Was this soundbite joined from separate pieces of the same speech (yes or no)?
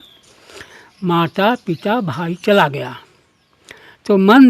no